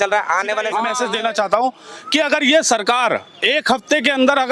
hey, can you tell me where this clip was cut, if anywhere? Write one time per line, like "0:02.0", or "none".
0:00.9